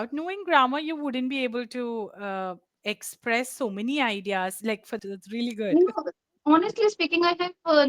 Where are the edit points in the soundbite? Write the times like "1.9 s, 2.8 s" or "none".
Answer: 5.0 s